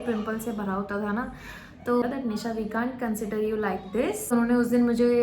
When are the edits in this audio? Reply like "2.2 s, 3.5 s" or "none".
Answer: 2.0 s, 4.3 s